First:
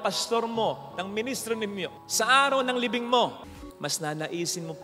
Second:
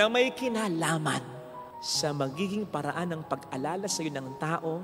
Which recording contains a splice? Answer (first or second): first